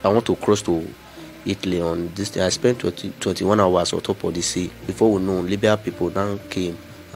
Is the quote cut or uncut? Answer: cut